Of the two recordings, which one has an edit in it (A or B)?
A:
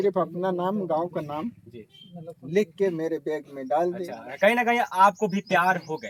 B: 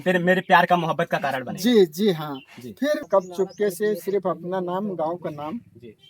B